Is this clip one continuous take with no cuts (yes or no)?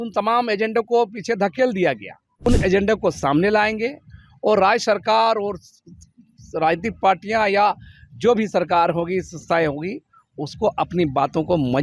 no